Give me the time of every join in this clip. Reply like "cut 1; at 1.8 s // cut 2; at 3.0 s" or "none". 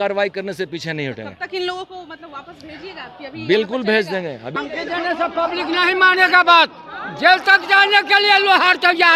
cut 1; at 4.5 s